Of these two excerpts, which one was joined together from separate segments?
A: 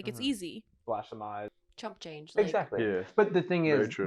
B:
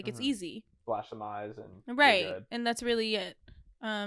A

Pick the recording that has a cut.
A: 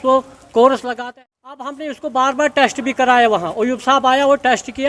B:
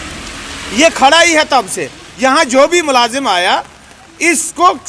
A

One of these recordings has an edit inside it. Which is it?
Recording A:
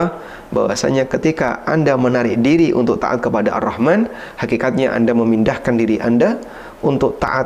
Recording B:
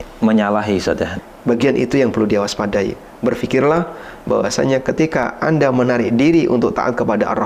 B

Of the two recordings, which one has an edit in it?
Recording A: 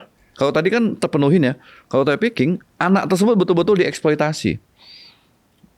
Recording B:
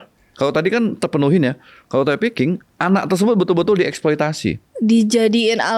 B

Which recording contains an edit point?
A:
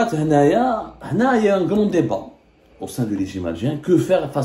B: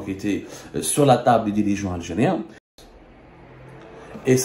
B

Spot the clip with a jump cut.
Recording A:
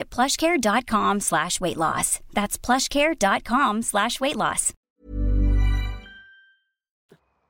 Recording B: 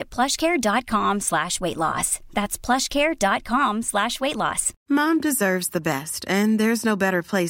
B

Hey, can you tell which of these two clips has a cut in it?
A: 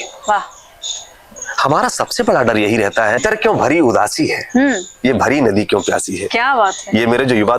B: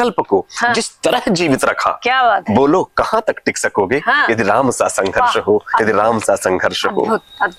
A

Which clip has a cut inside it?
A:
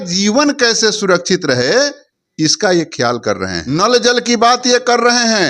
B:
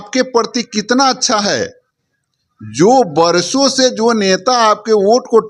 A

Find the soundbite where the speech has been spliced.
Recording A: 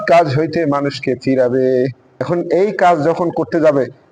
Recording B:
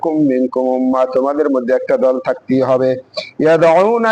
A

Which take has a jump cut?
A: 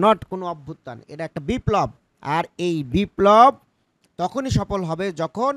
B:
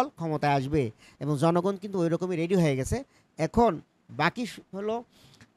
A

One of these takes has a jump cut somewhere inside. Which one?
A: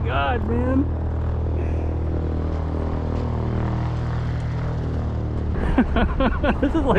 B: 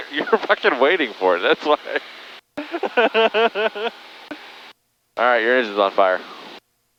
A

